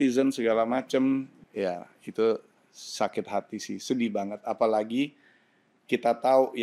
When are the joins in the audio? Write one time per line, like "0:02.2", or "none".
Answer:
0:01.3